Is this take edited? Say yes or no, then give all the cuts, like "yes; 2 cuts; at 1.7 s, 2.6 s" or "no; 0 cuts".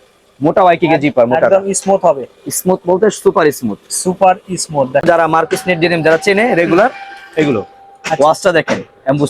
yes; 1 cut; at 5.0 s